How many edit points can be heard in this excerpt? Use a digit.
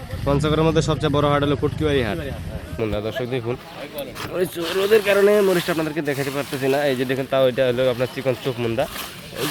1